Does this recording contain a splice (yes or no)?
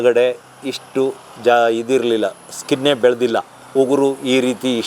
no